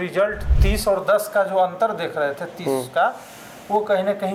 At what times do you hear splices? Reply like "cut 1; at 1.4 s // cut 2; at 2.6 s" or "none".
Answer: none